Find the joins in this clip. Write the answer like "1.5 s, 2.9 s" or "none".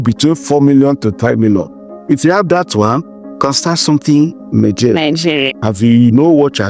5.5 s